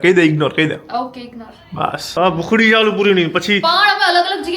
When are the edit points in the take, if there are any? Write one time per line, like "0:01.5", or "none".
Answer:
0:02.0